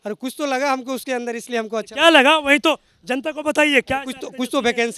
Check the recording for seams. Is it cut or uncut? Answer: uncut